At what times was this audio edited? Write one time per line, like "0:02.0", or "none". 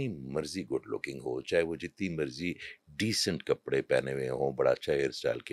none